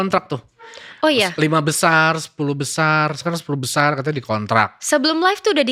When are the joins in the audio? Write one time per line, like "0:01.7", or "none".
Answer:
none